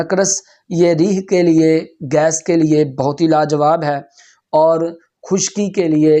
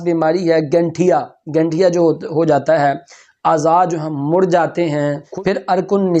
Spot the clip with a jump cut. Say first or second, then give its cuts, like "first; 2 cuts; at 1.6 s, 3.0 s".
second; 1 cut; at 5.2 s